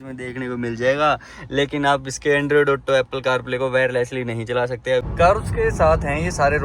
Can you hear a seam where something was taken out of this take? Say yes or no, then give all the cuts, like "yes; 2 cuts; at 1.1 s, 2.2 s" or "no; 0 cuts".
yes; 1 cut; at 5.1 s